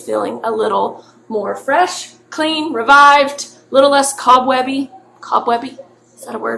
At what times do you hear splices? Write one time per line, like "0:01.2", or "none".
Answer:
none